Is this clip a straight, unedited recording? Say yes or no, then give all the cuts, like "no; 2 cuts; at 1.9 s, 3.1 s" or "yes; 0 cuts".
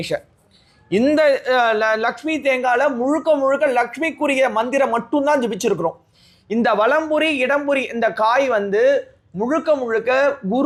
yes; 0 cuts